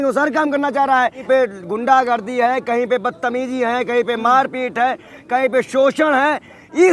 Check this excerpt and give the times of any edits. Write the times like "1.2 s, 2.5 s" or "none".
1.2 s